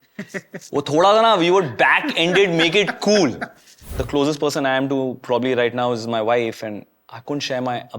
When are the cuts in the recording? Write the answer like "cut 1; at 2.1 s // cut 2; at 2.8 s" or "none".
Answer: cut 1; at 4.0 s